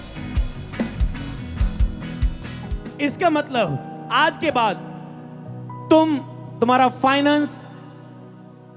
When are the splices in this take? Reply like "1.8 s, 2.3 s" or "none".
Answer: 2.6 s